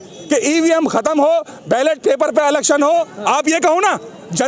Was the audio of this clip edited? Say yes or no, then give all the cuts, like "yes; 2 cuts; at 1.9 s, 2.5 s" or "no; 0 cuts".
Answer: yes; 1 cut; at 3.1 s